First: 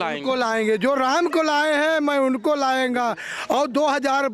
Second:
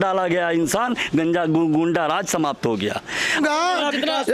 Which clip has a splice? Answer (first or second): second